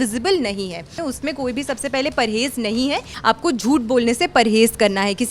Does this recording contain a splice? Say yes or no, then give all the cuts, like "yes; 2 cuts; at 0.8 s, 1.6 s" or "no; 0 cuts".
yes; 2 cuts; at 1.0 s, 3.1 s